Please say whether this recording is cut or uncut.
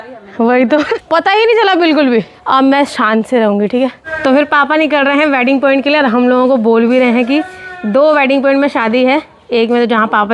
cut